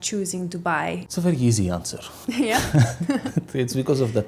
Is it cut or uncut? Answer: cut